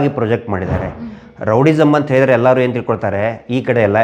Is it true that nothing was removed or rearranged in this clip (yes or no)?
yes